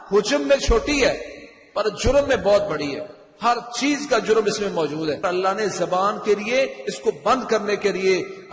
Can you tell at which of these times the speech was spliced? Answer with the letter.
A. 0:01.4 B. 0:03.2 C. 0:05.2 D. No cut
C